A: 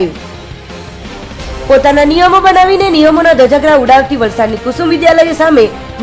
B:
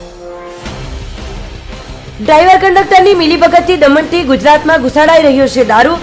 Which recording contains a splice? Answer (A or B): B